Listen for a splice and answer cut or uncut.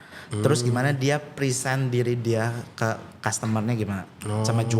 uncut